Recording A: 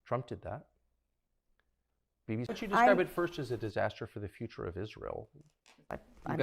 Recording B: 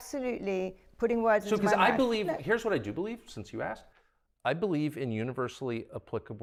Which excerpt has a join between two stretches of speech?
A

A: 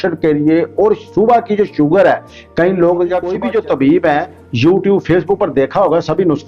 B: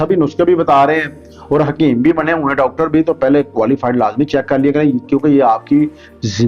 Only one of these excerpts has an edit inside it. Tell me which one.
A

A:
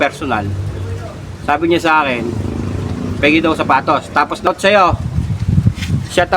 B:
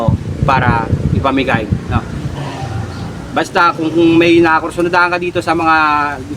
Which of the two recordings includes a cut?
A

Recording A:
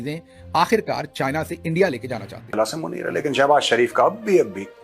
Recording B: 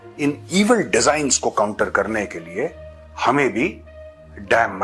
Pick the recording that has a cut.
A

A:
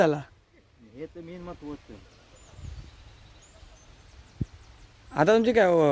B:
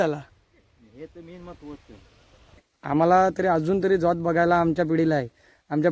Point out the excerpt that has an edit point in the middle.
B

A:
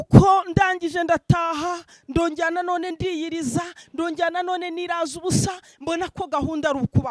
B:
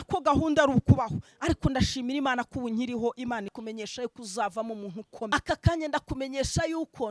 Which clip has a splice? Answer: B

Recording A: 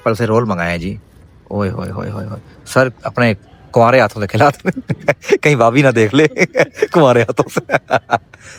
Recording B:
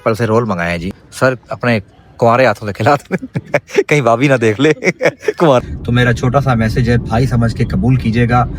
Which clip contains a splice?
B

